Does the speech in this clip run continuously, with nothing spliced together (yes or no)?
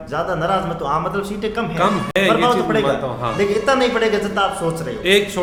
yes